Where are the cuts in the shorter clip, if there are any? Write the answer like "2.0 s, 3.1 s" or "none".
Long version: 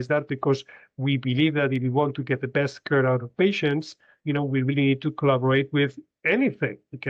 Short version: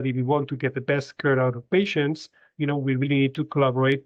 none